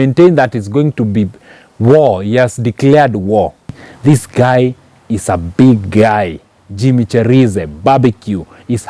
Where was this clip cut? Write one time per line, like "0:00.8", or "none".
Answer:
0:03.8